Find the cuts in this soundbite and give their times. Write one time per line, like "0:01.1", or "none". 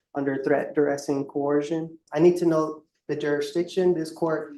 0:02.0